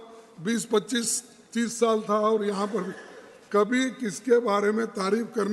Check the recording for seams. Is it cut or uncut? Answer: uncut